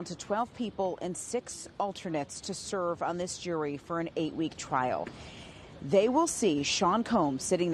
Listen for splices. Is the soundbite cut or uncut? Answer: cut